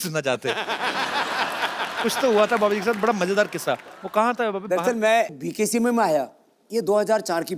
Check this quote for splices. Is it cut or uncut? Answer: uncut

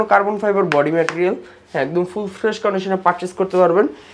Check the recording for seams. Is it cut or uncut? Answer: uncut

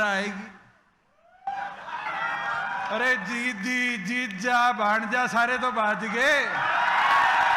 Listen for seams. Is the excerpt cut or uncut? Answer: uncut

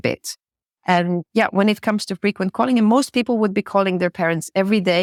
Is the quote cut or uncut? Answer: uncut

